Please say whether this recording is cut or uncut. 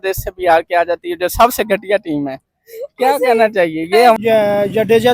cut